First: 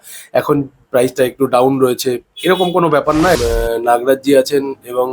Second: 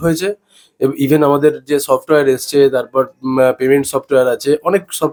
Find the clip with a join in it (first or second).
first